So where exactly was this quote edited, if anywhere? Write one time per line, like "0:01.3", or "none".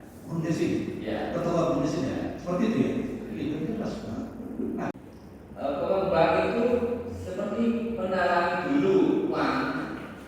0:04.9

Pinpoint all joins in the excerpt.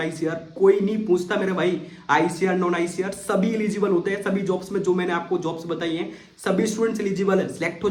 none

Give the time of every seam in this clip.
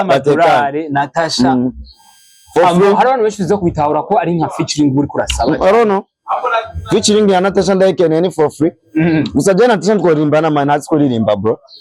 none

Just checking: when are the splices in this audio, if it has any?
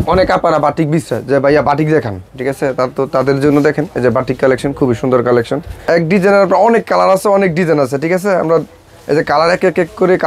0:05.7

